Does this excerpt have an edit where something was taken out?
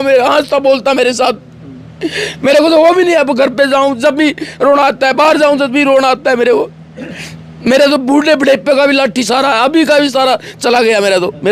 no; 0 cuts

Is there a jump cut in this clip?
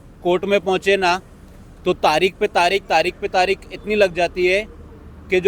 no; 0 cuts

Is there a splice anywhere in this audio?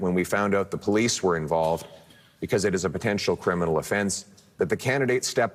no; 0 cuts

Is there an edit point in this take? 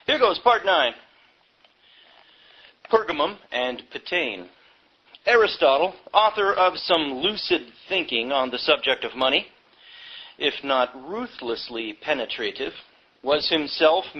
yes; 1 cut; at 3.9 s

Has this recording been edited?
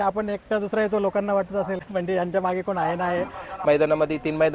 yes; 2 cuts; at 1.8 s, 3.6 s

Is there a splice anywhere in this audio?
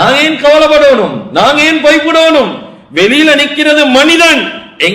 no; 0 cuts

